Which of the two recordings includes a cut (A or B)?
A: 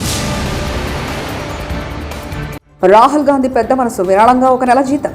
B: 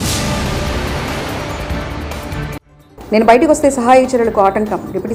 A